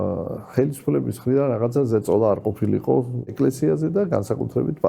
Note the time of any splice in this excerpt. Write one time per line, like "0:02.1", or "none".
0:03.3